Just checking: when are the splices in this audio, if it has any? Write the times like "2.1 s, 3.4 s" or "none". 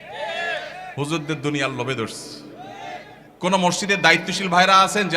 3.2 s